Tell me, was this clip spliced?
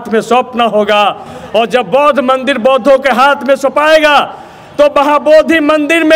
no; 0 cuts

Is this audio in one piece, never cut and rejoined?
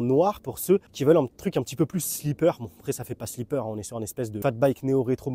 no; 2 cuts; at 0.9 s, 4.4 s

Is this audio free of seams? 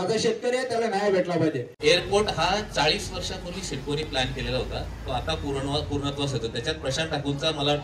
no; 1 cut; at 1.7 s

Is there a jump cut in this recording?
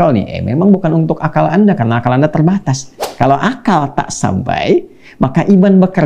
yes; 1 cut; at 3.1 s

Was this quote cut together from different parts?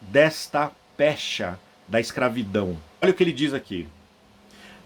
yes; 1 cut; at 3.0 s

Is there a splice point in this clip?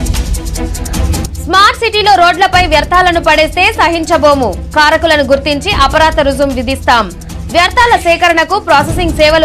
yes; 1 cut; at 1.2 s

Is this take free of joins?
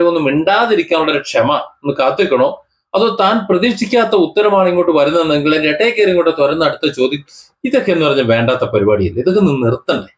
yes; 0 cuts

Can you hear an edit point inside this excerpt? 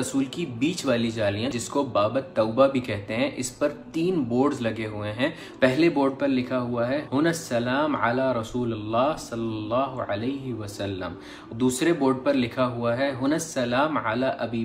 yes; 1 cut; at 1.5 s

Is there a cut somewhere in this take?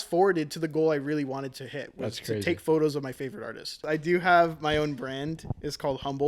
yes; 1 cut; at 3.8 s

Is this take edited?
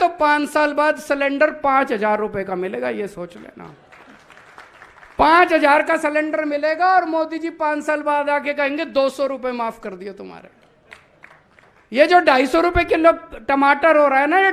no; 0 cuts

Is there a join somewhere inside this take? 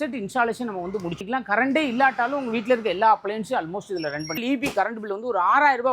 yes; 2 cuts; at 1.2 s, 4.4 s

